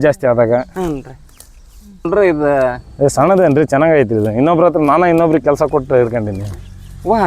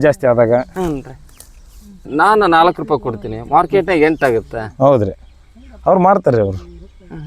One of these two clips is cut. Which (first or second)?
first